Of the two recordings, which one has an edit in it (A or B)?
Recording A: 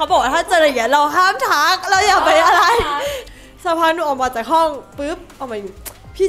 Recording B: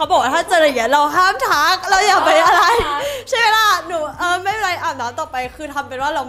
A